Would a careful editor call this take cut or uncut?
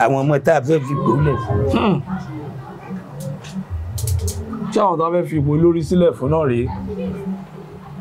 uncut